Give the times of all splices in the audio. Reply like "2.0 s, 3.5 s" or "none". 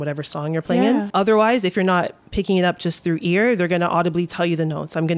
1.1 s